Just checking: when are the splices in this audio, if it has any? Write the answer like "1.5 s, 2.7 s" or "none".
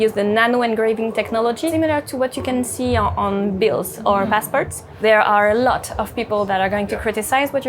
1.7 s, 5.0 s